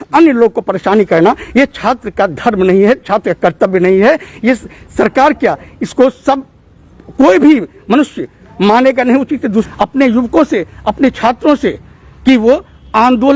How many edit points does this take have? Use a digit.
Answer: 1